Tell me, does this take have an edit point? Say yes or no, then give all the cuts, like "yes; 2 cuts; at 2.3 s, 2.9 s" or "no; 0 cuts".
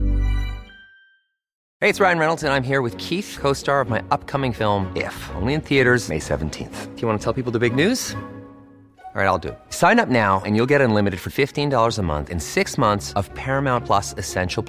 yes; 1 cut; at 1.6 s